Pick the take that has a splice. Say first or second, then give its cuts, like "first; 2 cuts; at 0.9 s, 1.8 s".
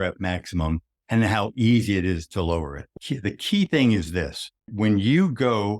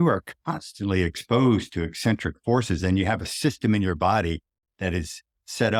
first; 2 cuts; at 2.9 s, 4.7 s